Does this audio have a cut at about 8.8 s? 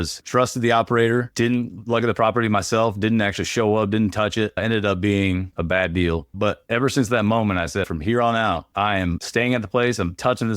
no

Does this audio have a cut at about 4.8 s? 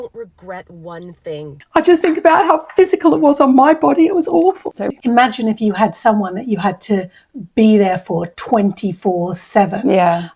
yes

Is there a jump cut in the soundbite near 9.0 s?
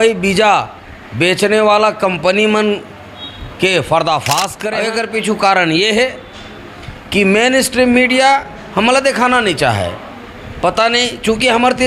no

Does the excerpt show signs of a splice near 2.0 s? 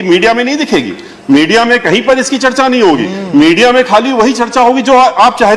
no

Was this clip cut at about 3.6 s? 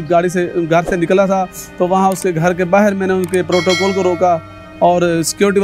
no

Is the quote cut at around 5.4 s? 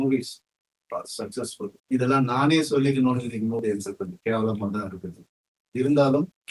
no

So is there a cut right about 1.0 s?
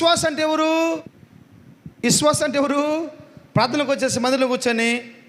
yes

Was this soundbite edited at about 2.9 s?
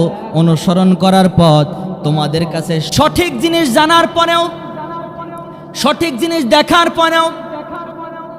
yes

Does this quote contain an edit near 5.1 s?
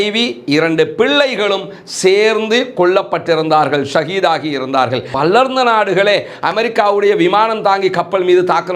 yes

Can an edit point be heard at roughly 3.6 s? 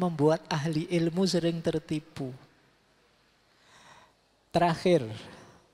yes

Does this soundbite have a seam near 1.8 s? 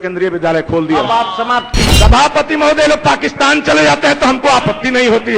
yes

